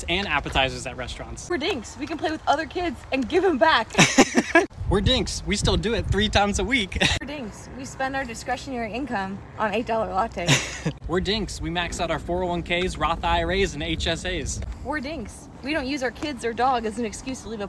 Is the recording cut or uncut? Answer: uncut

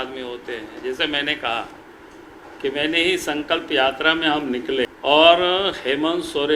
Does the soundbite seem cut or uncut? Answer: cut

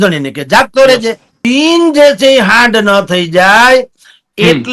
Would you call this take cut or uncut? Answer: cut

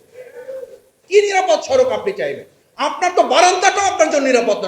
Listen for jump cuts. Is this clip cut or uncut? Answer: cut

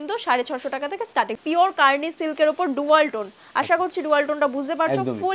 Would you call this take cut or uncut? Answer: cut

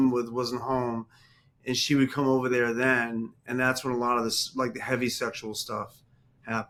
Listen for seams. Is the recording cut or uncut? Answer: uncut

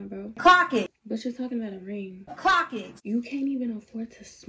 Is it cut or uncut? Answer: cut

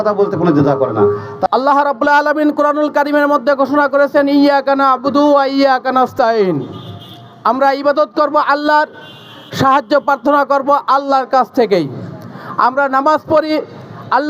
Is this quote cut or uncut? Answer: cut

